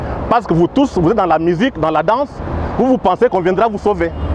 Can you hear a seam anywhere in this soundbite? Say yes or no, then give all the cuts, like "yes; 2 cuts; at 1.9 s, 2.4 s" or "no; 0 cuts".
no; 0 cuts